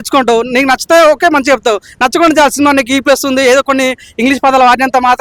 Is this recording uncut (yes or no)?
yes